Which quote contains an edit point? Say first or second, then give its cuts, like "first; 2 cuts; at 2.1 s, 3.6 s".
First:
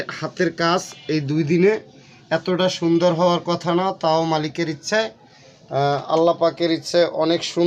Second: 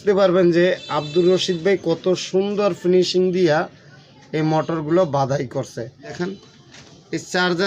second; 1 cut; at 6.1 s